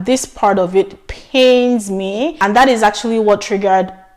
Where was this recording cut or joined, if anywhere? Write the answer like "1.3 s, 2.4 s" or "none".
2.3 s